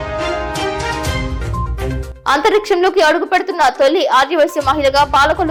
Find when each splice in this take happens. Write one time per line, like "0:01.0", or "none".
none